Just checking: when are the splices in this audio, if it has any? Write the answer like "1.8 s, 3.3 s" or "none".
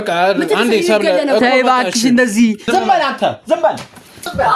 2.6 s